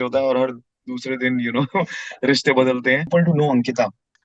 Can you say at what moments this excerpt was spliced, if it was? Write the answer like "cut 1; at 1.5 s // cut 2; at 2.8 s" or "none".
cut 1; at 3.0 s